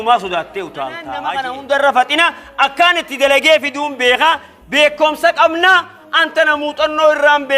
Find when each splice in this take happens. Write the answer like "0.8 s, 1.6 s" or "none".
1.1 s

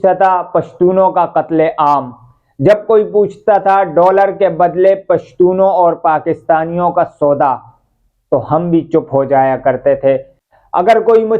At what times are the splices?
10.4 s

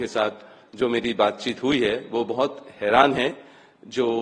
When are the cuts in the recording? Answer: none

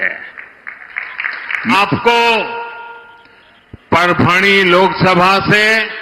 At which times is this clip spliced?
1.7 s

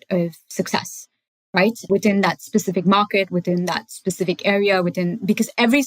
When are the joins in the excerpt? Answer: 1.9 s

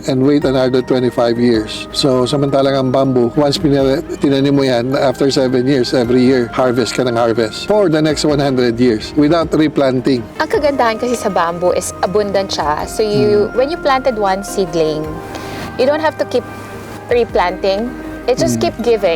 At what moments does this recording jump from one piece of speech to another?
1.8 s

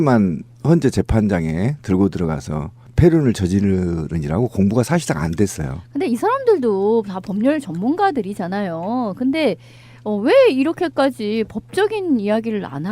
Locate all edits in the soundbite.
5.8 s

